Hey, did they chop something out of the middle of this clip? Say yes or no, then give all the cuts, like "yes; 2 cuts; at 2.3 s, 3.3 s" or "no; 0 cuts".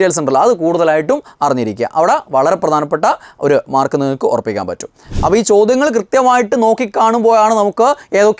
yes; 1 cut; at 5.1 s